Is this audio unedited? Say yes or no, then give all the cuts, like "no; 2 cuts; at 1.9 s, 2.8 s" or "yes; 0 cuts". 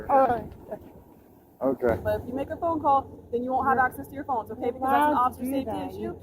no; 1 cut; at 2.0 s